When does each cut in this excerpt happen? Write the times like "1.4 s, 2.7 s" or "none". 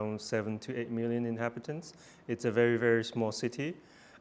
none